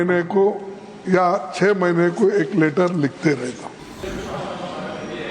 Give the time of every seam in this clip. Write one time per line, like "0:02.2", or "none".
0:04.0